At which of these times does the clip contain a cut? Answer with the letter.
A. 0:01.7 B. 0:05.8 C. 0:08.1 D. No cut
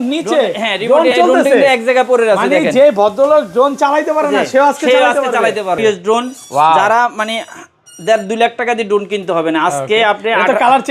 B